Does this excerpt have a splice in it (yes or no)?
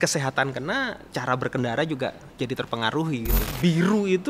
yes